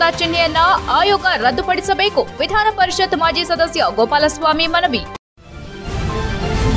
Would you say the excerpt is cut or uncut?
cut